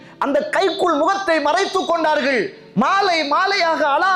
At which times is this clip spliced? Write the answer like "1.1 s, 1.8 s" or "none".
none